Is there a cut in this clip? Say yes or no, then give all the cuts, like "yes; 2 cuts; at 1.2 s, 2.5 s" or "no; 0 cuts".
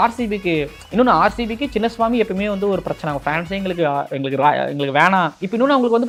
no; 0 cuts